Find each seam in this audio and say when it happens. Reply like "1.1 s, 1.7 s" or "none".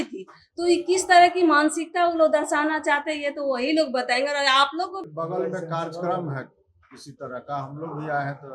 5.0 s

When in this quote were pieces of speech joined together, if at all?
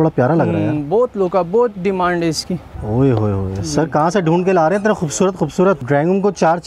2.7 s, 5.8 s

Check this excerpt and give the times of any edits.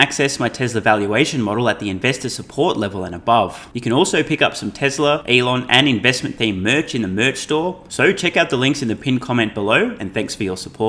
3.7 s, 5.2 s, 7.8 s

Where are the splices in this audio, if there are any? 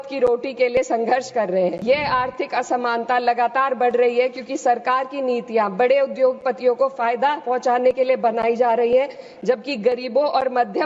1.8 s

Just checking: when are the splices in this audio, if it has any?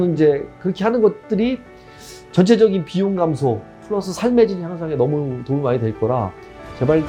none

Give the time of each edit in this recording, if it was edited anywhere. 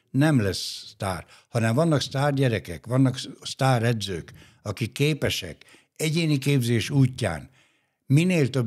none

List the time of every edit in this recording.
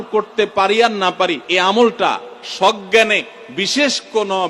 1.4 s

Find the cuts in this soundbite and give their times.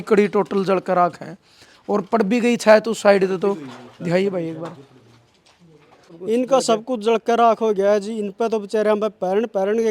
6.1 s

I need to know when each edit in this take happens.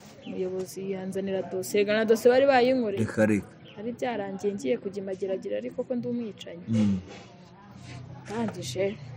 none

